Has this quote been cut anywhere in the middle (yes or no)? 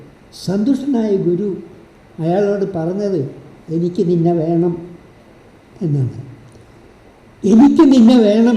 no